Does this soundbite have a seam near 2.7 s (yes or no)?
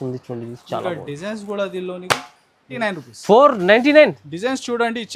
yes